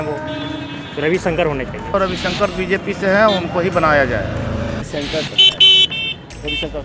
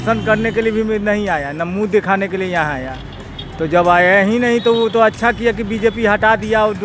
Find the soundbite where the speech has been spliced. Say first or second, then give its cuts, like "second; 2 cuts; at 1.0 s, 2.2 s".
first; 2 cuts; at 1.9 s, 4.8 s